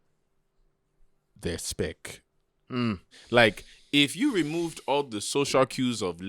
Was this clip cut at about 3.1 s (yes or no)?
yes